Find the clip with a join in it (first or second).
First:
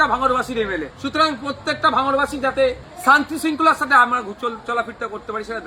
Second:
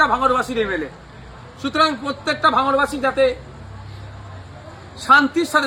first